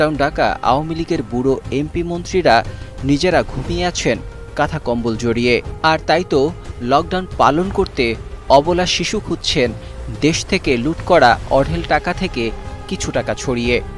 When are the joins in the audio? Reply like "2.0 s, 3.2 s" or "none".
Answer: none